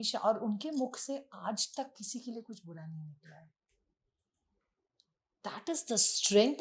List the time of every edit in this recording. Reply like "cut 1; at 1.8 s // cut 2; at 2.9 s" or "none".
none